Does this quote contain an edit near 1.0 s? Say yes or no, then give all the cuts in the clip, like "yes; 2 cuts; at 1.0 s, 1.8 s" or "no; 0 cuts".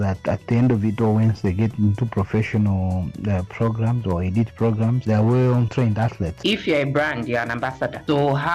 no; 1 cut; at 6.3 s